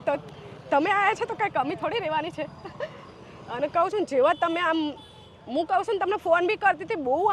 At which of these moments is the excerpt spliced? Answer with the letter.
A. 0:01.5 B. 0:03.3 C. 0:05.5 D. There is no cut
D